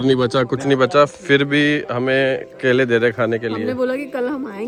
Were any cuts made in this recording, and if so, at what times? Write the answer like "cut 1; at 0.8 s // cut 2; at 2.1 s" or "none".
none